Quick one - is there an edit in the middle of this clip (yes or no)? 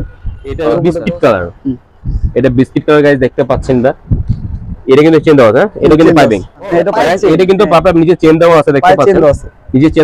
yes